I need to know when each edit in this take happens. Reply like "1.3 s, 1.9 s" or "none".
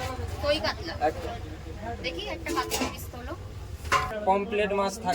4.2 s